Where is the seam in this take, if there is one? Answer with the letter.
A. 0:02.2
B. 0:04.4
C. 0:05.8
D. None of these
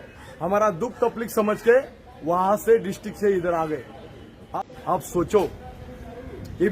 B